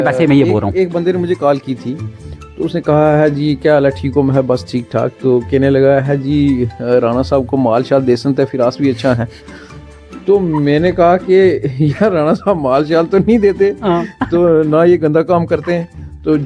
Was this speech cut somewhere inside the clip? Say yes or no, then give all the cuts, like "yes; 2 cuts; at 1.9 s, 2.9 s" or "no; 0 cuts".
no; 0 cuts